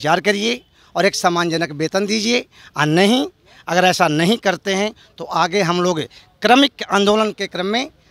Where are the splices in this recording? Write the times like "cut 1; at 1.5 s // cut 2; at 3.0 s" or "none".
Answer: none